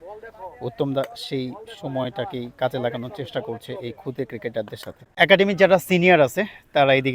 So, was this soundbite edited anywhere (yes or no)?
yes